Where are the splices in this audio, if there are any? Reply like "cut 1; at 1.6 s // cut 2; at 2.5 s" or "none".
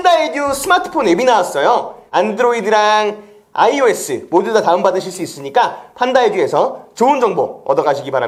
none